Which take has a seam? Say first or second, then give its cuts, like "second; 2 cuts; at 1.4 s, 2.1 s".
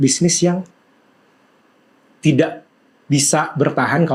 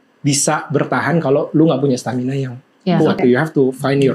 second; 1 cut; at 3.2 s